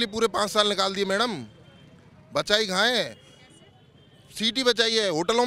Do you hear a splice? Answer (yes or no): no